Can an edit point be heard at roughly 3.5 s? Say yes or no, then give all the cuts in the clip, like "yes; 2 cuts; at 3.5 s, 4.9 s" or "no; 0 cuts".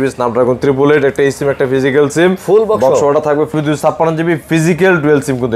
yes; 1 cut; at 3.5 s